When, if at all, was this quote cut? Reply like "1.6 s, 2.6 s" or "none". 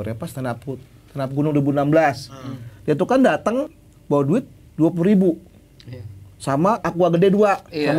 3.7 s, 6.8 s